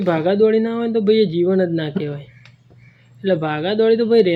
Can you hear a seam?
no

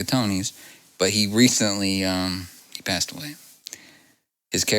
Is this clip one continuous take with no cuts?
no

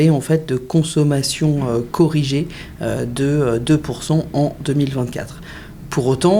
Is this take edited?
no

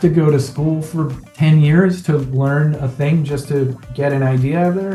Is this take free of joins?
yes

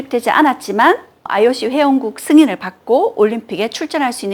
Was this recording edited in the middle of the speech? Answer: no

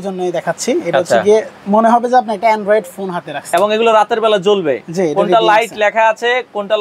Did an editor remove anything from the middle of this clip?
no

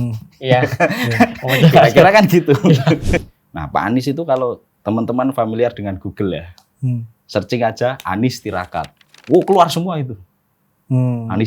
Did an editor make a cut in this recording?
yes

